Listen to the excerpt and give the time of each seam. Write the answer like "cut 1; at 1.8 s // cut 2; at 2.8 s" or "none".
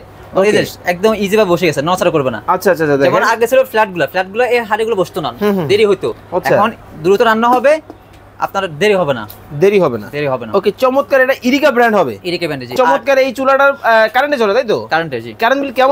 cut 1; at 12.7 s